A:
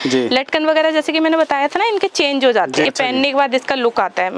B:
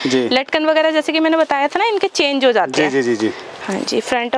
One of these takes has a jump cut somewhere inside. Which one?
A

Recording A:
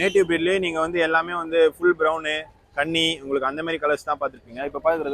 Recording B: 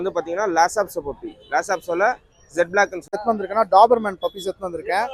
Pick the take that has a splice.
B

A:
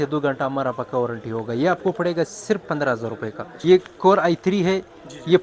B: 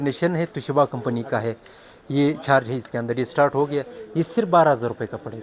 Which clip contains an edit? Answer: A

